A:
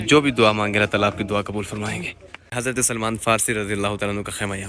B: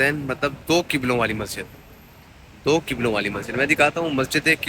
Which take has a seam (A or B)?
A